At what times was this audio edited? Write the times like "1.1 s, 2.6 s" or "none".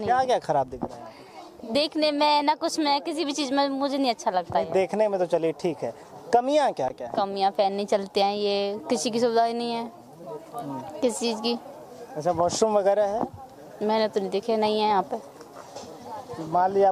none